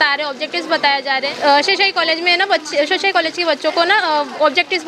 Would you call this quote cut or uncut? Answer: cut